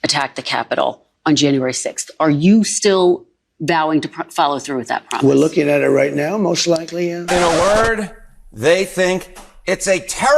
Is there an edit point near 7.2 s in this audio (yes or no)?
yes